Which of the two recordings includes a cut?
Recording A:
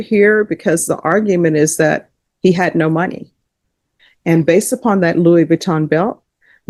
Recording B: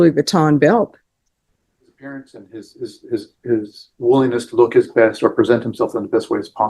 B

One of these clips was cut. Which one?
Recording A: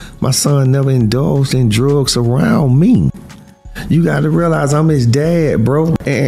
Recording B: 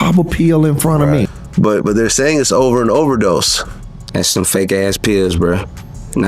B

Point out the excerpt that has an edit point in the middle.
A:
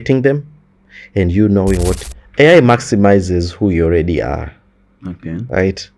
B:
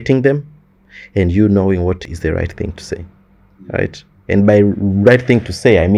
A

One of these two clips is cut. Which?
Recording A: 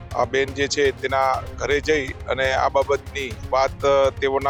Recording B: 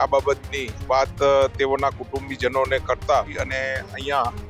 B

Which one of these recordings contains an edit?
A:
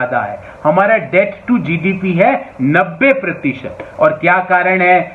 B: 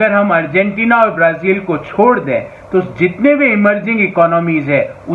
A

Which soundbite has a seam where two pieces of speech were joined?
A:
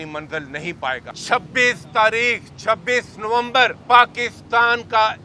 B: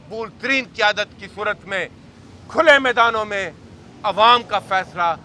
A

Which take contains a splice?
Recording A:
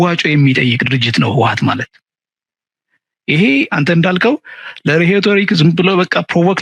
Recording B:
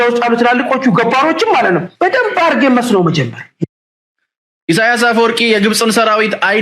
B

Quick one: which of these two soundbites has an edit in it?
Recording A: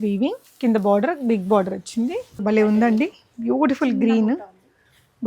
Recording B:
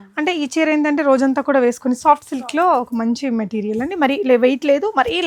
A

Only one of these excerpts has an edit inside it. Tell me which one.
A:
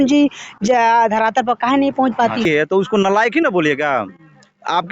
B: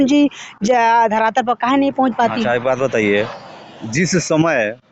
A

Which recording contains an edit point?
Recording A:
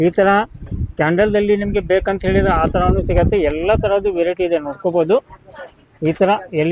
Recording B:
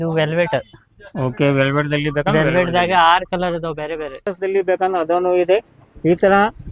B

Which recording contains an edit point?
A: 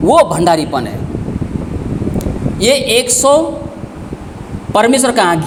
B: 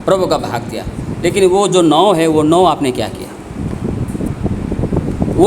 B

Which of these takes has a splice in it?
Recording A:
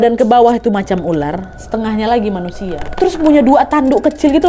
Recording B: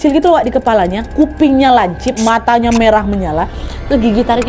A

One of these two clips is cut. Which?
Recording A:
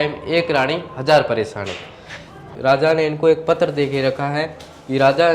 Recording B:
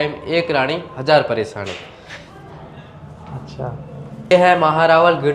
A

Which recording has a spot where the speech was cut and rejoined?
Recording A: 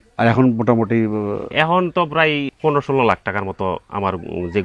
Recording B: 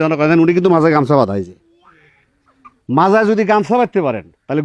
A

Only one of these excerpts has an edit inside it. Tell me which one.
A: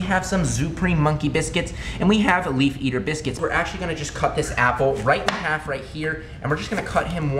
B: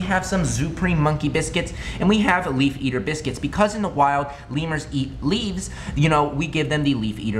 A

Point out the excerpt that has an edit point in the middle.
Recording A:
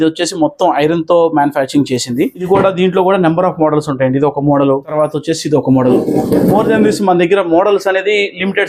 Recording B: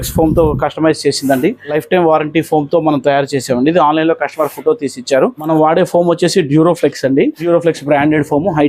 B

